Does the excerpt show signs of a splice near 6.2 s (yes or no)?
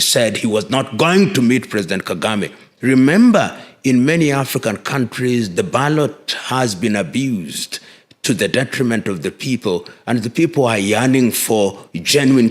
no